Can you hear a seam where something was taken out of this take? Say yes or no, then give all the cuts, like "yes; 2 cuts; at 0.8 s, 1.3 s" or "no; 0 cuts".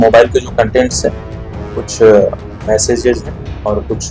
no; 0 cuts